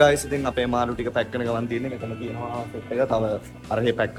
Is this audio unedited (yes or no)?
yes